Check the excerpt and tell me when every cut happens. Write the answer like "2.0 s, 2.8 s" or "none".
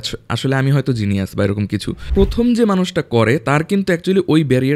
2.1 s